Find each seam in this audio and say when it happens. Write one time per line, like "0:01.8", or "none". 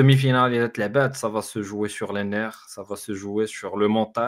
none